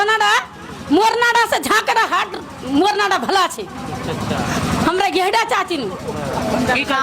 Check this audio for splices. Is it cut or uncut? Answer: uncut